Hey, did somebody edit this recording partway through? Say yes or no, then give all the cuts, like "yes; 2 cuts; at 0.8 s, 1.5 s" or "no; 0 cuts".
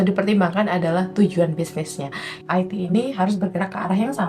yes; 1 cut; at 2.4 s